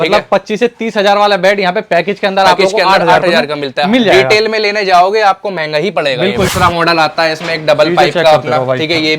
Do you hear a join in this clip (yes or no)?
yes